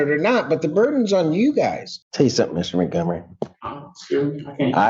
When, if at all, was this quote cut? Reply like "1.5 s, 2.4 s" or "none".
1.9 s